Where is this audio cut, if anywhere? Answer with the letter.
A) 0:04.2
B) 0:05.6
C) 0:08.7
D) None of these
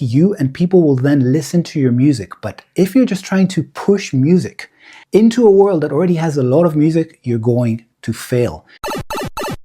C